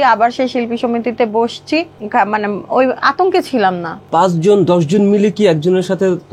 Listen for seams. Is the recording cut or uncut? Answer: cut